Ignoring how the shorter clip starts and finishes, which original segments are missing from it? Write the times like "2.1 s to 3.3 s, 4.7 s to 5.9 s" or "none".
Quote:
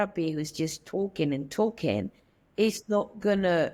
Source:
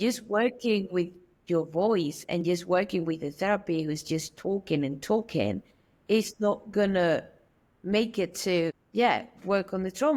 none

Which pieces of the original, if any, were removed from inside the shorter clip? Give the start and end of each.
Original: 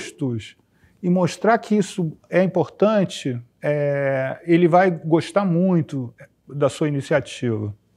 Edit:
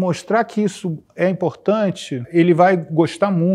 3.4 s to 4.4 s

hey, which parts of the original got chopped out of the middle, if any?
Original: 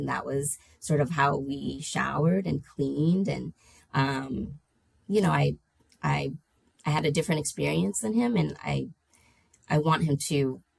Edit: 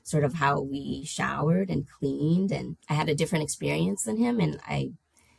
3.5 s to 6.7 s

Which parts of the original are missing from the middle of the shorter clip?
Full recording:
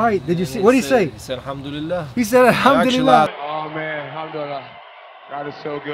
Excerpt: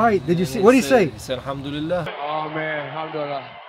2.1 s to 3.3 s

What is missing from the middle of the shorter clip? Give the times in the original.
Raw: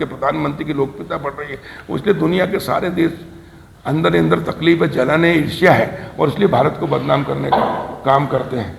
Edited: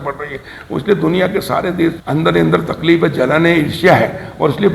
3.2 s to 3.8 s

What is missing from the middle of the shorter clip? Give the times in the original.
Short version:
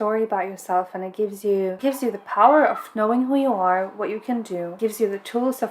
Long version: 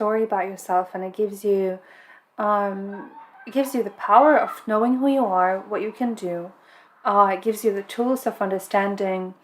1.8 s to 3.5 s, 6.5 s to 7.4 s

